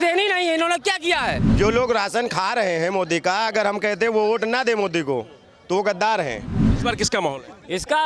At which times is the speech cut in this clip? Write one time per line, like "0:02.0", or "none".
0:01.5
0:06.7